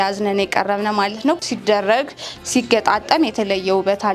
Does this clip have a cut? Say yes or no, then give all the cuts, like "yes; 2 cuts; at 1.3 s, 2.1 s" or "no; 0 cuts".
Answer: yes; 1 cut; at 1.4 s